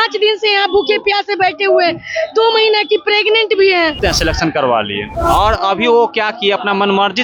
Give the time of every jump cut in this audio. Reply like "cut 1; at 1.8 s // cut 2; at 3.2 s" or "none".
cut 1; at 4.0 s // cut 2; at 5.1 s